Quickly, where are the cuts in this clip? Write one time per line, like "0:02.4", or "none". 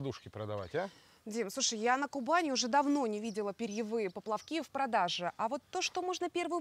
none